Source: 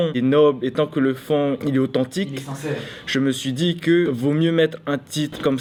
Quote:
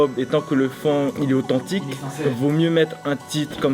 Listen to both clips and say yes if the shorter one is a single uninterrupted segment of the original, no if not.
no